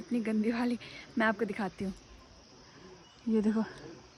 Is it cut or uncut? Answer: uncut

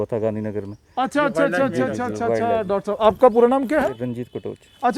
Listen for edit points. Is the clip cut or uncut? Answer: uncut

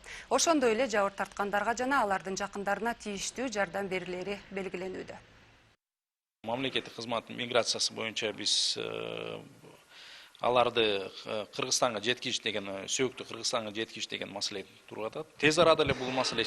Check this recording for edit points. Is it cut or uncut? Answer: cut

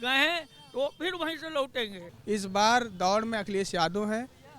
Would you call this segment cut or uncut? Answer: cut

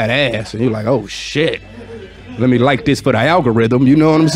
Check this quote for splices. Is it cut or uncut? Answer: uncut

